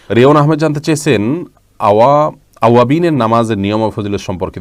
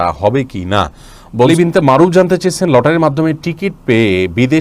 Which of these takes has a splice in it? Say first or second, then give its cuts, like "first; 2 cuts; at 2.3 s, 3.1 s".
second; 1 cut; at 1.5 s